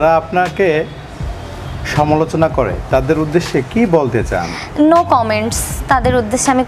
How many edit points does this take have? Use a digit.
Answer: 0